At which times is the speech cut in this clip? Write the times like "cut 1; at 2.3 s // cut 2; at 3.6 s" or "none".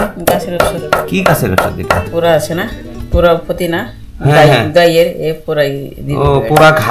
cut 1; at 2.1 s